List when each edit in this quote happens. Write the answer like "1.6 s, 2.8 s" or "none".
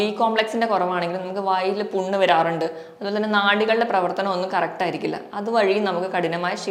none